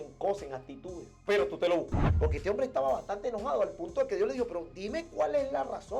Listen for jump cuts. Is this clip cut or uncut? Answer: cut